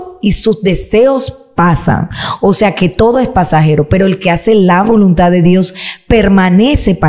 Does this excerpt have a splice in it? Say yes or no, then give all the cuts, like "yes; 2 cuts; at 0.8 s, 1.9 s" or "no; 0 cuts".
no; 0 cuts